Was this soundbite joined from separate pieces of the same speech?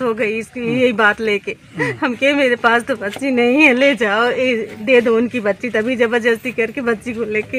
no; 0 cuts

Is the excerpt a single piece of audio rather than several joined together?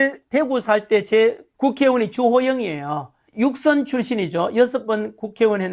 no; 2 cuts; at 1.5 s, 3.2 s

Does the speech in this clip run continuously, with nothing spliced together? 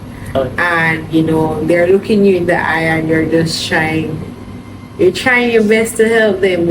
yes; 0 cuts

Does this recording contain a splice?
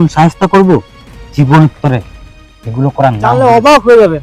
yes; 1 cut; at 3.3 s

